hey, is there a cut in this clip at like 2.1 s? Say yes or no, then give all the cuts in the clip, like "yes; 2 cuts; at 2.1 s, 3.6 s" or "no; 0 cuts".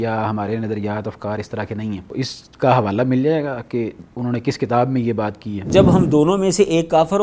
yes; 2 cuts; at 2.1 s, 5.7 s